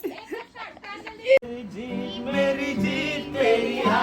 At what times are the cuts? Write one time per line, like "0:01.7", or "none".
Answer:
0:01.4